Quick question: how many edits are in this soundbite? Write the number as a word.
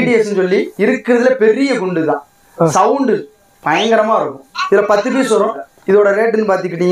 one